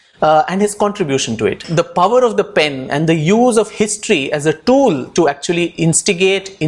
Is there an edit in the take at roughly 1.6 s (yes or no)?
yes